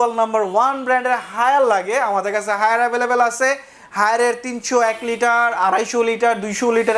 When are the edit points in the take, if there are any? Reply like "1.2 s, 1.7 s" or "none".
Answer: none